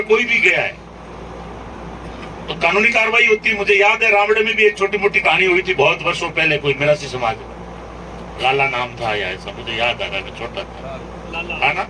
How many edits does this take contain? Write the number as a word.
zero